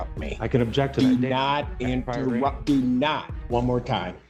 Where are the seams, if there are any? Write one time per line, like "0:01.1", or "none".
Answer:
0:03.3